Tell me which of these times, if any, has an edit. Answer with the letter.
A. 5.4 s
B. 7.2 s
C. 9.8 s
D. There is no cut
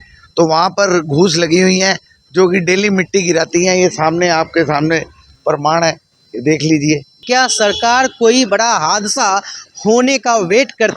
B